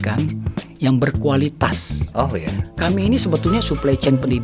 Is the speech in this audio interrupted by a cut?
yes; 1 cut; at 2.5 s

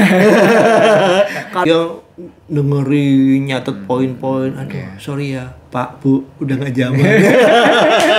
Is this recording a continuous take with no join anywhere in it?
no; 1 cut; at 1.6 s

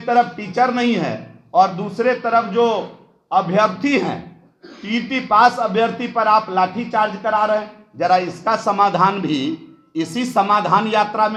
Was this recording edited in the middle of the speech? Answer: no; 0 cuts

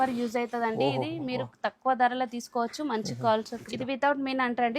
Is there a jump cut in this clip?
yes; 1 cut; at 3.6 s

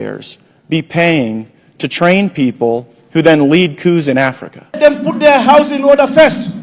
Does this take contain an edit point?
yes; 1 cut; at 4.8 s

